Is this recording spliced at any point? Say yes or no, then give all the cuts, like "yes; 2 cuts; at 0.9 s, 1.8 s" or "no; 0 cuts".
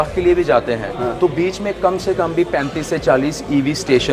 no; 0 cuts